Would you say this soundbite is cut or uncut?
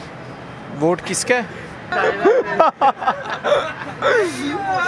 cut